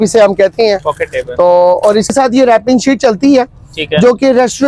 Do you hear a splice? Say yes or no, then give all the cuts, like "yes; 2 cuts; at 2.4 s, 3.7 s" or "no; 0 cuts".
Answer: yes; 1 cut; at 2.1 s